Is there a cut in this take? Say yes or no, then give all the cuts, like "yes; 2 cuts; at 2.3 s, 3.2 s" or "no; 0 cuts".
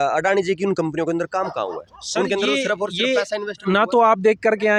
no; 0 cuts